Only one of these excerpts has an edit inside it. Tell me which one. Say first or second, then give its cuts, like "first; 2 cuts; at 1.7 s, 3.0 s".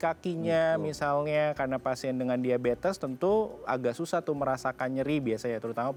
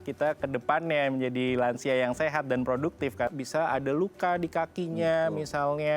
second; 1 cut; at 3.3 s